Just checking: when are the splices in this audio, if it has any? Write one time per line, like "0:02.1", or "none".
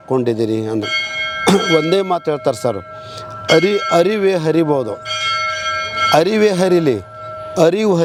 none